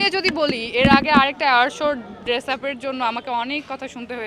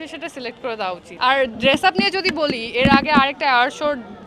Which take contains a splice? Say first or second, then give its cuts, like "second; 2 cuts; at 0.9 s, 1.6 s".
second; 1 cut; at 1.1 s